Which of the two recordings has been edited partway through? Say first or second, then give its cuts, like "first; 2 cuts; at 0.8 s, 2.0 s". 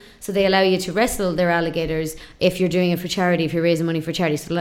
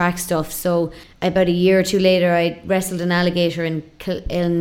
second; 1 cut; at 1.0 s